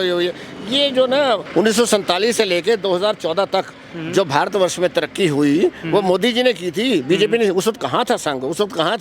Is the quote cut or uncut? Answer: cut